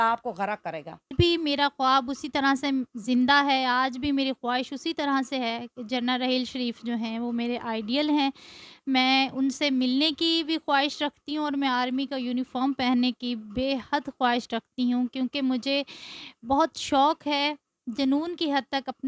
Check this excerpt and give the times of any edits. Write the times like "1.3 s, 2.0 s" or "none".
1.1 s